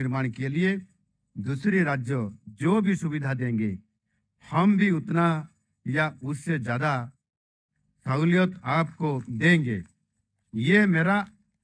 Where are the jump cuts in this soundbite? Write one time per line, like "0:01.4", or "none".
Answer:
none